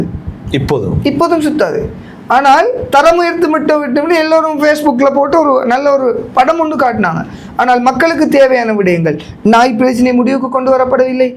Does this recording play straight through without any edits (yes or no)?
yes